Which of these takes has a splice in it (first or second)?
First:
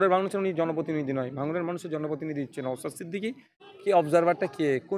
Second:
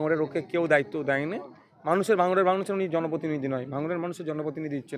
first